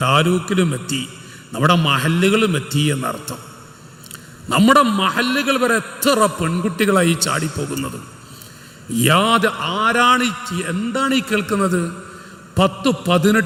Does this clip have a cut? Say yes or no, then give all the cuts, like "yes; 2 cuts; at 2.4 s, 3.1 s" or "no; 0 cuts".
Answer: no; 0 cuts